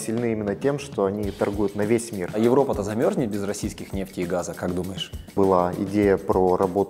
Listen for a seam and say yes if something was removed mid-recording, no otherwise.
yes